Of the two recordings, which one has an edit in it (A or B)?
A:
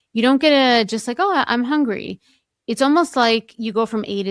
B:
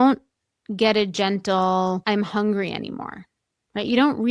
B